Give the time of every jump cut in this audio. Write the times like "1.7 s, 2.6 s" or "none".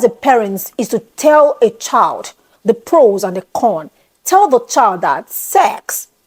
none